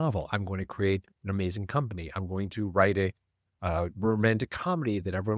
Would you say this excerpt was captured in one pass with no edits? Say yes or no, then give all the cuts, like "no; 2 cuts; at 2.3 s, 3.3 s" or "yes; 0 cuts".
yes; 0 cuts